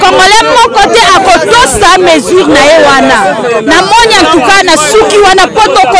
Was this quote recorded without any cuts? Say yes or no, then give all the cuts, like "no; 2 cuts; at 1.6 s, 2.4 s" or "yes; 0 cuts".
yes; 0 cuts